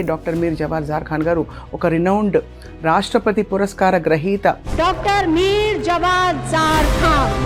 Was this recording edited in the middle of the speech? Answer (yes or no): no